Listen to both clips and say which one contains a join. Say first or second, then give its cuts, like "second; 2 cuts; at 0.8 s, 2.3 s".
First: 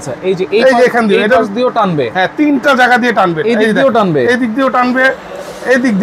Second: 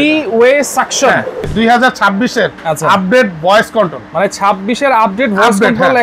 second; 1 cut; at 1.4 s